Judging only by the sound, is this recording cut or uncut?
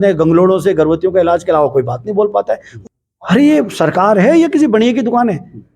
cut